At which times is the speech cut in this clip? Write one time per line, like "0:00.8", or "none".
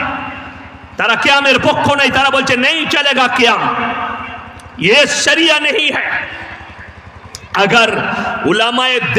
none